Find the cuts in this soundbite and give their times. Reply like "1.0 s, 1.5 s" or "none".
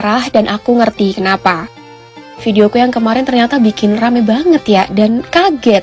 none